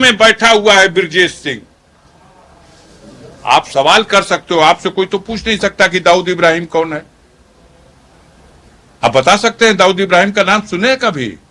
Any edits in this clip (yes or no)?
no